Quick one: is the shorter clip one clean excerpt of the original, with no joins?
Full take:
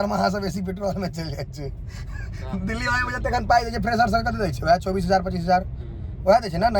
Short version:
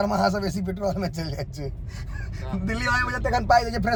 yes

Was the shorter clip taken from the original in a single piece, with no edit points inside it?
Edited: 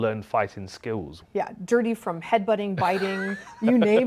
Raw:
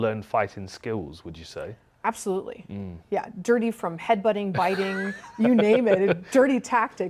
no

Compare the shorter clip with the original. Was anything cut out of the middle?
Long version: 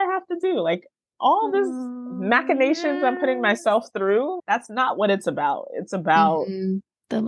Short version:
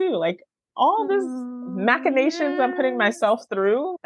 no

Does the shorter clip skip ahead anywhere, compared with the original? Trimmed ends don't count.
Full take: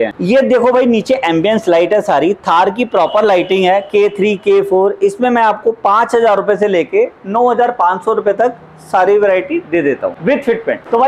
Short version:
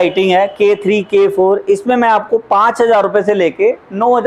no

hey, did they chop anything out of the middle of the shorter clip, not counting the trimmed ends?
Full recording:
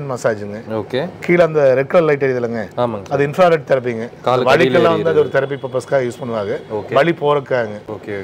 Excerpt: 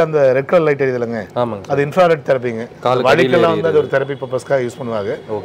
no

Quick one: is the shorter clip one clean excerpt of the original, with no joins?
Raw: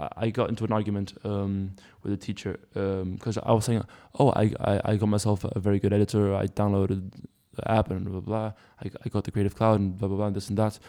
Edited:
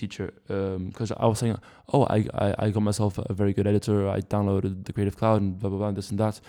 no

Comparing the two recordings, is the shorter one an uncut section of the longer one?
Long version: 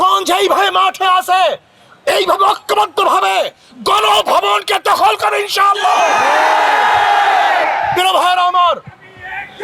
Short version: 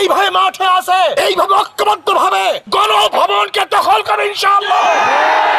no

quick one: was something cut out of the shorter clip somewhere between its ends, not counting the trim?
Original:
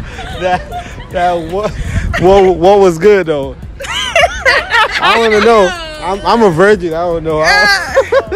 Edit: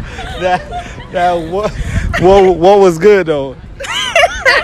no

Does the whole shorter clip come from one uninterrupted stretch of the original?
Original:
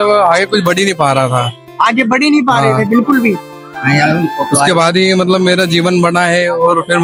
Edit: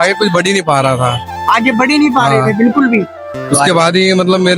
no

